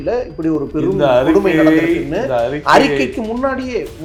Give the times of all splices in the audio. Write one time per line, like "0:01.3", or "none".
none

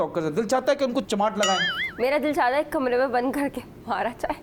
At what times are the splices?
none

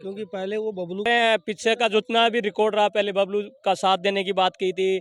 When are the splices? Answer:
0:01.1

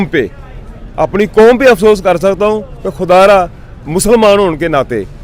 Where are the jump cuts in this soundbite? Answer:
none

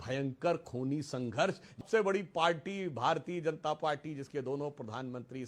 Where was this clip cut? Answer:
0:01.8

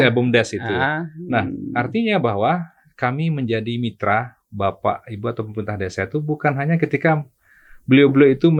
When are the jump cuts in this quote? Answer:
none

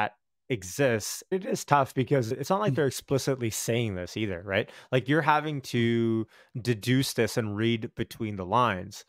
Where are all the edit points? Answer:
0:01.3
0:02.4

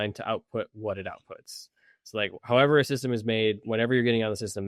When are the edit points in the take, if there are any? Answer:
none

